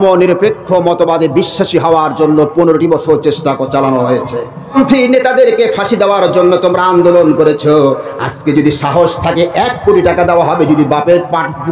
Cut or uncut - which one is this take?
cut